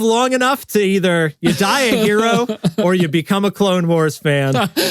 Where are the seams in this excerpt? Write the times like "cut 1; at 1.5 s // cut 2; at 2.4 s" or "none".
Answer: none